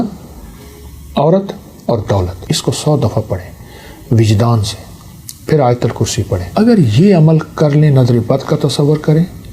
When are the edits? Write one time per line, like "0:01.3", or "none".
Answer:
0:02.4
0:06.4

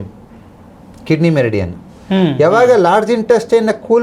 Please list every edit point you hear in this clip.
none

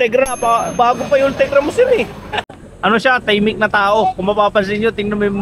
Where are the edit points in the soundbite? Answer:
0:02.6

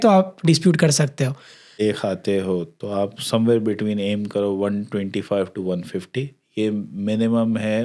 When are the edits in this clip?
0:01.8

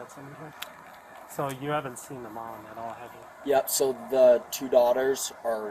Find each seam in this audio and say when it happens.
none

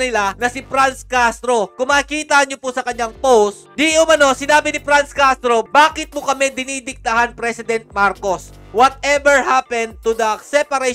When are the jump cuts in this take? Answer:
none

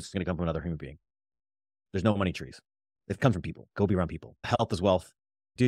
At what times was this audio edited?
0:03.6
0:04.3

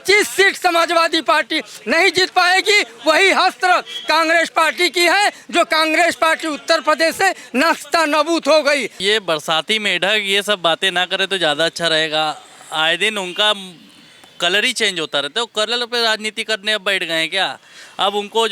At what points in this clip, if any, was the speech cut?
0:08.9

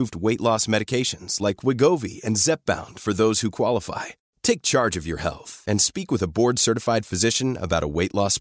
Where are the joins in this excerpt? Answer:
none

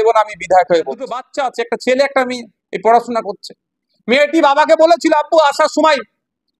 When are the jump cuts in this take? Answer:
0:01.3

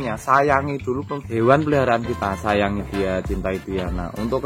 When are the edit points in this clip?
0:01.2

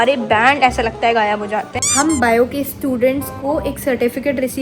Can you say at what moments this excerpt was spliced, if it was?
0:01.8

